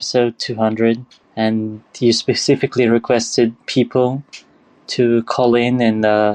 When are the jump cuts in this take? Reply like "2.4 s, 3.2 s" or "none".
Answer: 1.4 s